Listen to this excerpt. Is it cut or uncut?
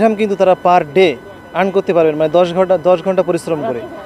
uncut